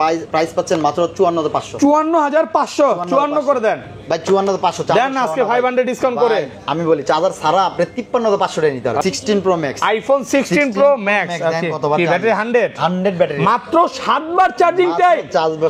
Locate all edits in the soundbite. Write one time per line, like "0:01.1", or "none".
0:09.0